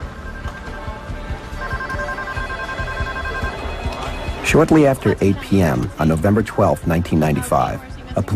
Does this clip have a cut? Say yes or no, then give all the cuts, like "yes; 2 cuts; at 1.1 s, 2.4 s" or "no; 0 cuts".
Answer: yes; 1 cut; at 3.0 s